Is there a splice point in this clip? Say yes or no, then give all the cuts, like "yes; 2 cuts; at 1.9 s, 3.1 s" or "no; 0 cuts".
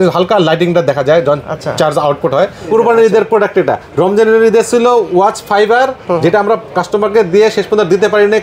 yes; 1 cut; at 2.7 s